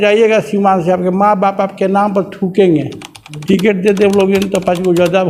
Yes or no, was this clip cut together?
yes